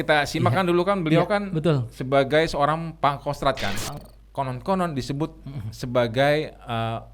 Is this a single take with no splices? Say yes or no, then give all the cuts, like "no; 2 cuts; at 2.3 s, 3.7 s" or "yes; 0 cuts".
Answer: no; 1 cut; at 4.0 s